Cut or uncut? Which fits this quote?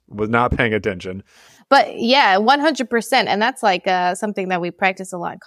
uncut